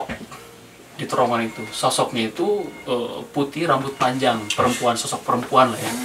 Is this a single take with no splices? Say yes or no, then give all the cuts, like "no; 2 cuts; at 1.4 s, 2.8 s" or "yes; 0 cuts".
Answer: yes; 0 cuts